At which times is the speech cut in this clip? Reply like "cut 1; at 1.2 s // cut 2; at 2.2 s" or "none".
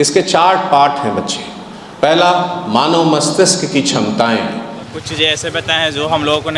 cut 1; at 4.9 s